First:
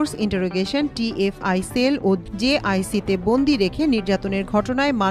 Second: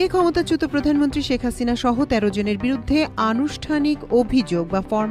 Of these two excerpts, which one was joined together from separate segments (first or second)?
first